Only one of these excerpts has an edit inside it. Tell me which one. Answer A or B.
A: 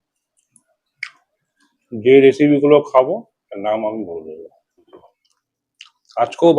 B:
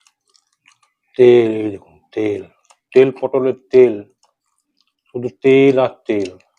A